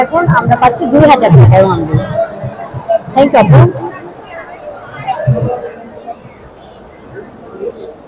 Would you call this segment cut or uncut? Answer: uncut